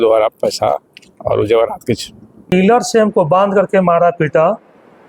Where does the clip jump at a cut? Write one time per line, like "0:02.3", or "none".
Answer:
0:02.4